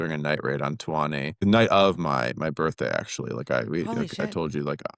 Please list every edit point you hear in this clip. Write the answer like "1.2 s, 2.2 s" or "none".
1.4 s